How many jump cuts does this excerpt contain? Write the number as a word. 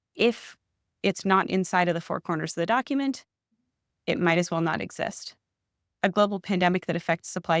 one